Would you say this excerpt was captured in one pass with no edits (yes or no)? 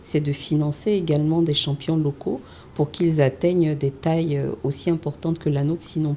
yes